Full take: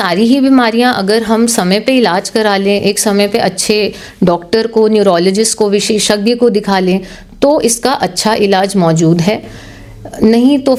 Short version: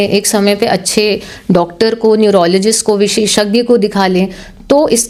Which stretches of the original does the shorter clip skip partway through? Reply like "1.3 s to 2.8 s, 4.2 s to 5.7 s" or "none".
none